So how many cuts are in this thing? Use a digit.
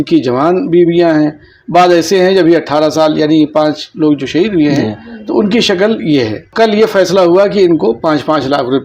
1